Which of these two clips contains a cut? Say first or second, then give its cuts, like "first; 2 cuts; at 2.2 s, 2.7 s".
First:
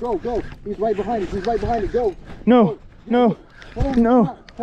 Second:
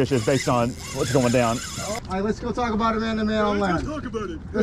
second; 1 cut; at 1.9 s